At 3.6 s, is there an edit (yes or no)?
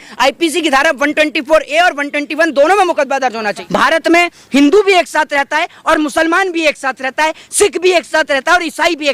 yes